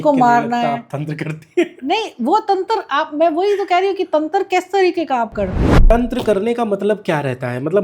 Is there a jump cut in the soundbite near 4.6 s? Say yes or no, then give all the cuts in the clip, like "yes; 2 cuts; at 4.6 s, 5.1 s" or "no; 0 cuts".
no; 1 cut; at 5.9 s